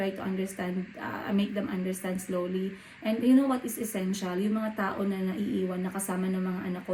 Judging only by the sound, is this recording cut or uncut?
uncut